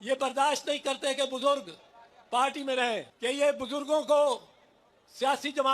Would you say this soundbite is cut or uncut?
cut